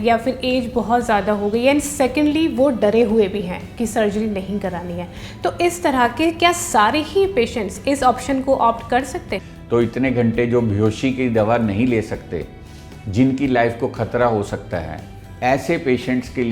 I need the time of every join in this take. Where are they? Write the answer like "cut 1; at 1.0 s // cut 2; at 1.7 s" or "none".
cut 1; at 9.4 s // cut 2; at 15.2 s